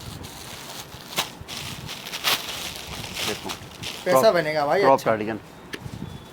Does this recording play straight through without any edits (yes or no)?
yes